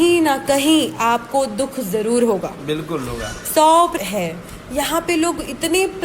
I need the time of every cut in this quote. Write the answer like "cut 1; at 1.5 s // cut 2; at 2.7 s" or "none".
cut 1; at 3.9 s

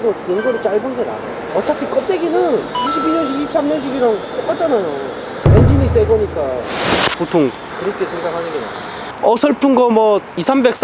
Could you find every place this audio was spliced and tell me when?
cut 1; at 7.7 s // cut 2; at 9.1 s

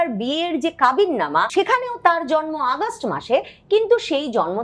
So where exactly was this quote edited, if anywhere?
cut 1; at 1.5 s

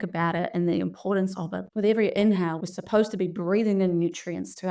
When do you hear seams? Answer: cut 1; at 1.6 s // cut 2; at 2.6 s

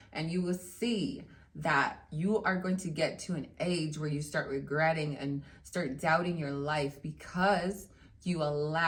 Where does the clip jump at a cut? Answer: none

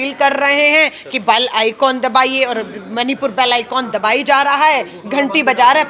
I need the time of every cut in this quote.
none

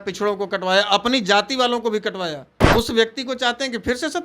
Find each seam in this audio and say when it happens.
cut 1; at 2.5 s

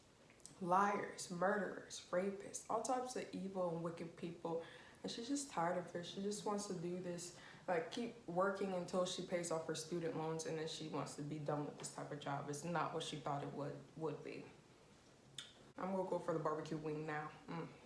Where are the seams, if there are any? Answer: cut 1; at 15.7 s

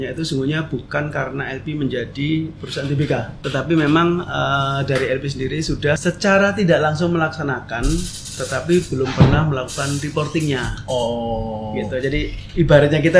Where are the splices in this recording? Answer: cut 1; at 3.4 s // cut 2; at 6.0 s

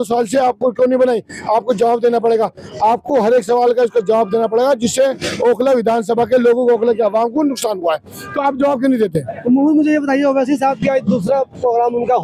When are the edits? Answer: none

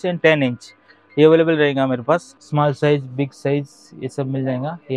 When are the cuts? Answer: cut 1; at 2.4 s

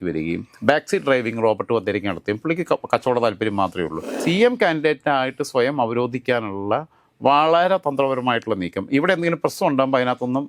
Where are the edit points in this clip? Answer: cut 1; at 4.2 s

